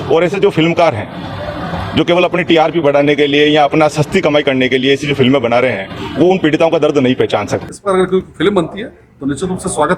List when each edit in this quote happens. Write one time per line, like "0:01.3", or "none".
0:07.6